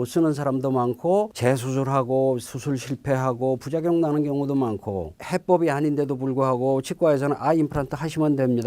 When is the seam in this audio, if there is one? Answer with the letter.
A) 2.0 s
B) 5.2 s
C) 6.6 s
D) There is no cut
B